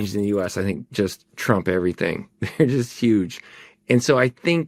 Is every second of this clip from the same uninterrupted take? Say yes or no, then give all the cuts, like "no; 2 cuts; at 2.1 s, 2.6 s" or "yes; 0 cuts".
yes; 0 cuts